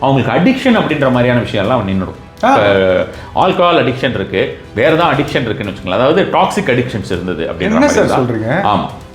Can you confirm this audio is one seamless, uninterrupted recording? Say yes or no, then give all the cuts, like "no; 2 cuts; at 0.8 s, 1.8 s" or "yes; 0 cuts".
yes; 0 cuts